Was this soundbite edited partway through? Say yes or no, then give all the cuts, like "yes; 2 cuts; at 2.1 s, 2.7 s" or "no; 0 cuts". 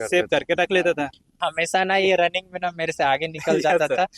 yes; 1 cut; at 1.4 s